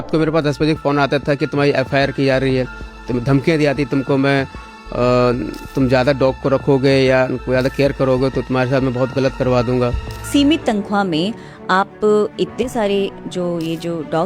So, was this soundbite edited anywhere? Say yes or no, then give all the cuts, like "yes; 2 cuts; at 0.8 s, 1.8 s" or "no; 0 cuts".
yes; 1 cut; at 10.3 s